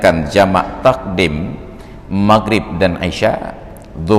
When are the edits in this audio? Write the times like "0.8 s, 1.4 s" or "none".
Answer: none